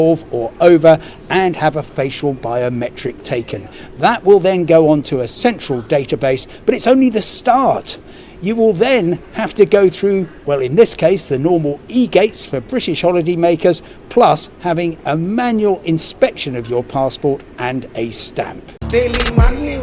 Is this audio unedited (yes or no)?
no